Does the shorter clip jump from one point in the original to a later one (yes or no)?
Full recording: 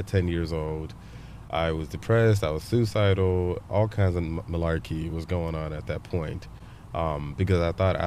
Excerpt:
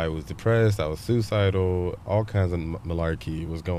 no